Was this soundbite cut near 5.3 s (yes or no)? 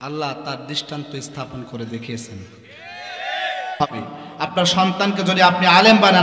no